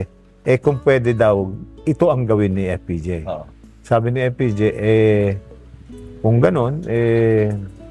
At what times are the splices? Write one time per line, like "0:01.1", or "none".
none

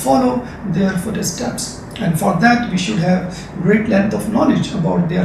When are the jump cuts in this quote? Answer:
0:03.7

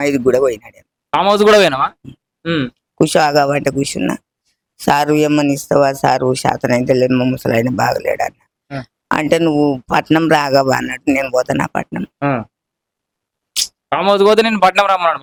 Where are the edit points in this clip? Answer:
none

